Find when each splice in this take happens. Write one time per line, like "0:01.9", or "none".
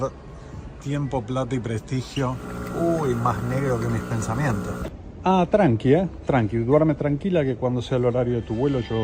0:02.5
0:05.0